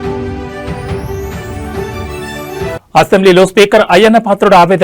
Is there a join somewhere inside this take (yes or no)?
yes